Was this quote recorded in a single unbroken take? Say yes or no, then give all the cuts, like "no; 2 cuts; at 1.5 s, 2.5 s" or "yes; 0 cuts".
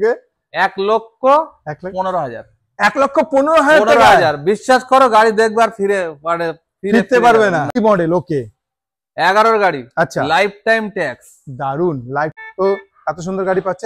no; 2 cuts; at 7.8 s, 12.3 s